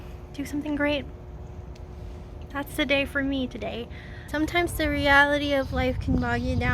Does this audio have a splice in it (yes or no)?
yes